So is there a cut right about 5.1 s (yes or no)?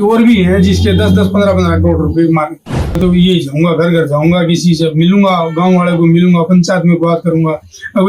no